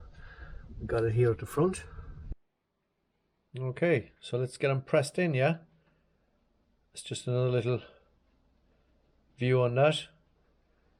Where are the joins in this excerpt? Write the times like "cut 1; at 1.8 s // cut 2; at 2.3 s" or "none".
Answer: cut 1; at 2.2 s